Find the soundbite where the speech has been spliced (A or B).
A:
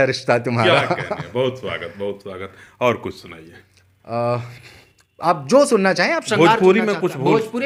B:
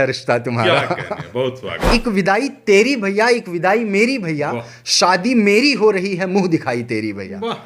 B